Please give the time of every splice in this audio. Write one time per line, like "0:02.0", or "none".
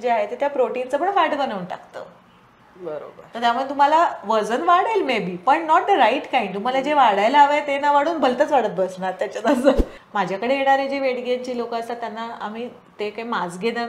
0:10.0